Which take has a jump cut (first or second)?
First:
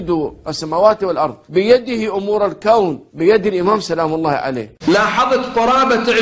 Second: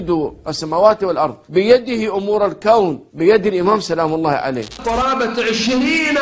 second